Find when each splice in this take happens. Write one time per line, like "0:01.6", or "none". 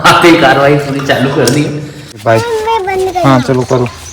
0:02.1